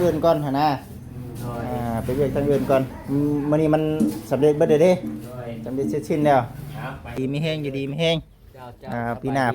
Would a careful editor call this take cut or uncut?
cut